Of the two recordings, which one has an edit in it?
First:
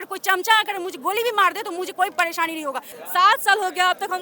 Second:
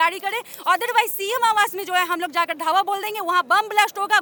first; 1 cut; at 3.0 s

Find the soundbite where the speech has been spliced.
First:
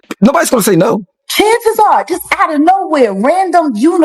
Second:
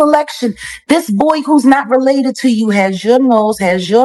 first; 1 cut; at 1.2 s

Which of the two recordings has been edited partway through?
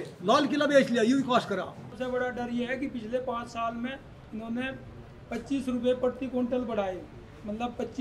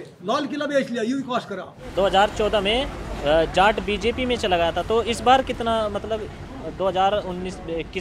first; 1 cut; at 1.8 s

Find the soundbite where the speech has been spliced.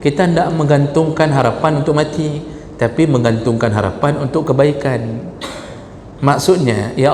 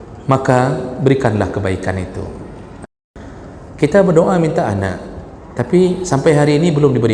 second; 1 cut; at 3.1 s

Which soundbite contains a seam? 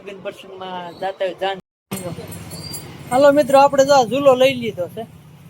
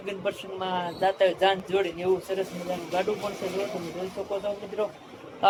first; 1 cut; at 1.6 s

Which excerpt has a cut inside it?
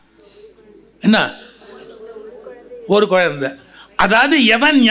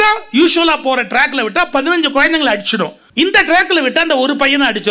second; 1 cut; at 3.0 s

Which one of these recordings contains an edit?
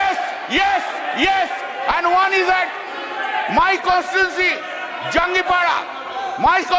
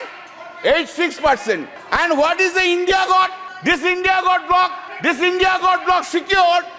second; 3 cuts; at 1.8 s, 3.5 s, 4.9 s

